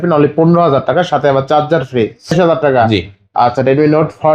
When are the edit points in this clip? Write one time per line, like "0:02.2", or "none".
0:02.3